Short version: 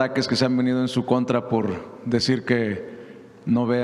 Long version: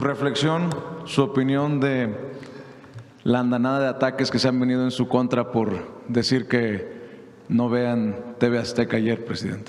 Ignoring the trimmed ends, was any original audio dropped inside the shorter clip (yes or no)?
no